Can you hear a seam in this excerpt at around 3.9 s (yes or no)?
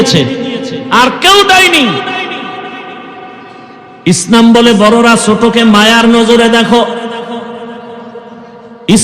yes